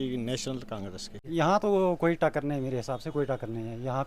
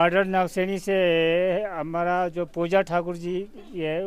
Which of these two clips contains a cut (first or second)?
first